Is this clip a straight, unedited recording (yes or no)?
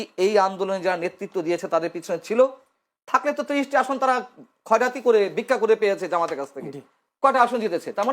yes